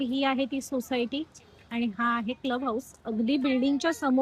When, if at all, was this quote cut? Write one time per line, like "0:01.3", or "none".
none